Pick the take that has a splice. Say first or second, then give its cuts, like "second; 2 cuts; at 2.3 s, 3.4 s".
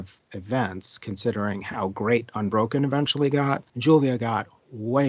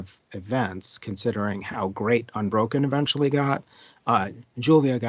first; 1 cut; at 3.7 s